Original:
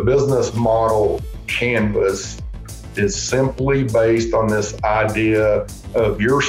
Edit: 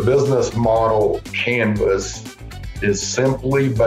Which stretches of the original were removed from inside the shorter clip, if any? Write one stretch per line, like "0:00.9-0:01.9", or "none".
0:01.3-0:01.5